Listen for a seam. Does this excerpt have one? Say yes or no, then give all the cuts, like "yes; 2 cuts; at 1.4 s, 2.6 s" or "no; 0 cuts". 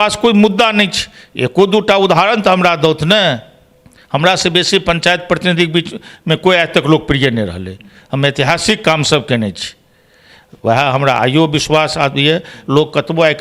no; 0 cuts